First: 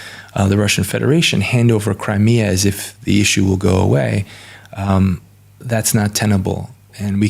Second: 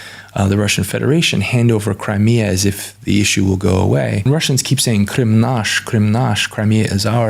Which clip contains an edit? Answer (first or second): second